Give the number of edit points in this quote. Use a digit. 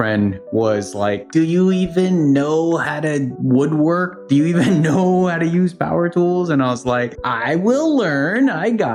0